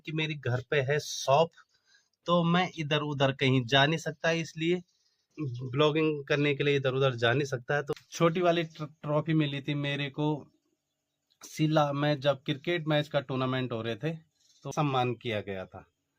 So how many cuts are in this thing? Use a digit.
2